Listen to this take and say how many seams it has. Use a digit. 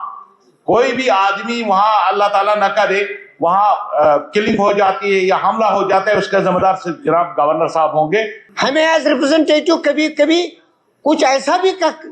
1